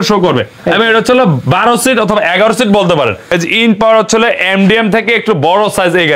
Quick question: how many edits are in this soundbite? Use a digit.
1